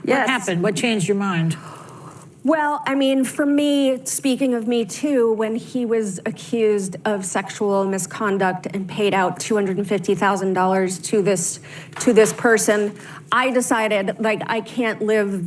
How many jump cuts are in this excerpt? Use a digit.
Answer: 0